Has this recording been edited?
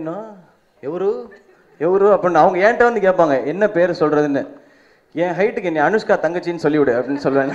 no; 0 cuts

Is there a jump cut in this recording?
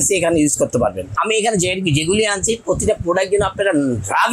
yes; 1 cut; at 1.1 s

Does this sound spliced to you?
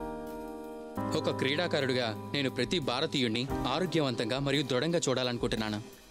yes; 1 cut; at 1.0 s

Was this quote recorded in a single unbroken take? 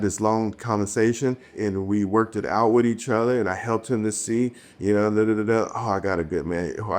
no; 1 cut; at 1.5 s

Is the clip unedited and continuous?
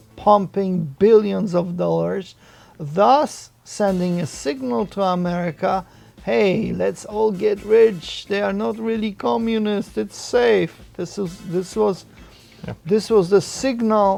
yes; 0 cuts

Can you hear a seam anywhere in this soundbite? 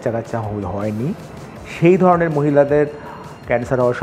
no; 0 cuts

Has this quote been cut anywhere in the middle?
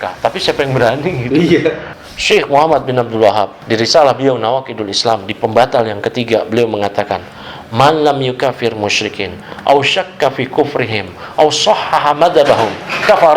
yes; 2 cuts; at 1.9 s, 3.6 s

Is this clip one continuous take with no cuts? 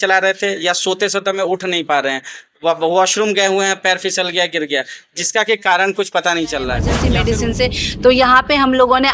no; 1 cut; at 7.0 s

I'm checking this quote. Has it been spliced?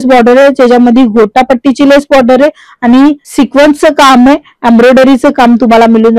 no; 0 cuts

